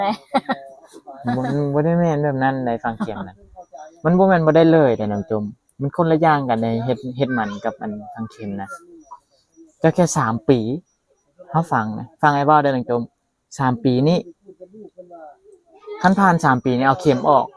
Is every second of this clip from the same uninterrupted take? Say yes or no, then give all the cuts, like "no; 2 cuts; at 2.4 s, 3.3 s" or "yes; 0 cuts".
yes; 0 cuts